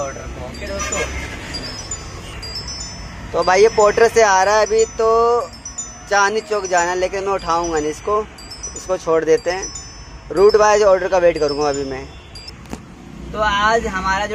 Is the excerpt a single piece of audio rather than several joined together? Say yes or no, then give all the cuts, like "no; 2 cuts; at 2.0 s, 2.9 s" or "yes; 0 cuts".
yes; 0 cuts